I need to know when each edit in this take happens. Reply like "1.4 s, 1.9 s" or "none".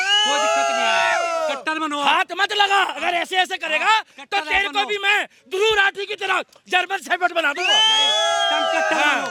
none